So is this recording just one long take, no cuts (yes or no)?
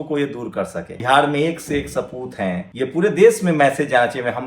no